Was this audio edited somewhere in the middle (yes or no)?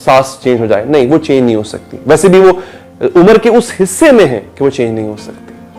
no